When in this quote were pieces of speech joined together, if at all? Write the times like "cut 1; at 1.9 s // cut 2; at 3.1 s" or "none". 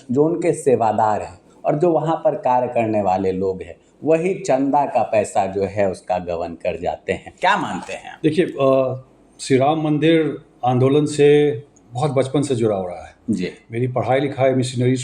cut 1; at 7.3 s